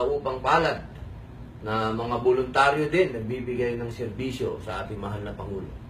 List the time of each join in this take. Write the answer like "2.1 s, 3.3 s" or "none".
4.0 s